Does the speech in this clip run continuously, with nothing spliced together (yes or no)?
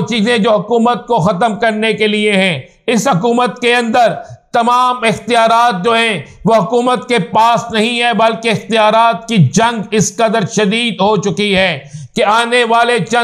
yes